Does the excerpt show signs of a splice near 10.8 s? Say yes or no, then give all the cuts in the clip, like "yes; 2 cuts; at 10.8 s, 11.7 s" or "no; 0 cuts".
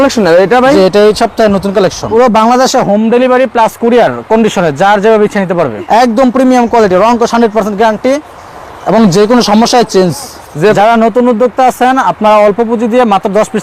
yes; 3 cuts; at 2.0 s, 5.8 s, 10.8 s